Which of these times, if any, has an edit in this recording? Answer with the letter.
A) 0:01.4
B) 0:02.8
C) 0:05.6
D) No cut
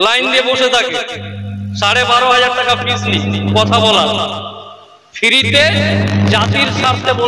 D